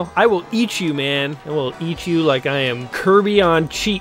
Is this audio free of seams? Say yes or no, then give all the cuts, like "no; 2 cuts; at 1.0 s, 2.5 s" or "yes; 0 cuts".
no; 2 cuts; at 1.4 s, 2.9 s